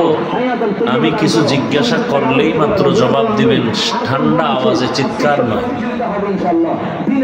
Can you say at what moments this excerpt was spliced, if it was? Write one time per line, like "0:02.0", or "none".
none